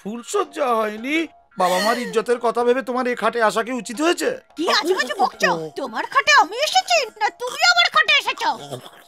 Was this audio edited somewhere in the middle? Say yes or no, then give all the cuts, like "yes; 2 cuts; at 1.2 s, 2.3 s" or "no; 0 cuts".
yes; 1 cut; at 4.5 s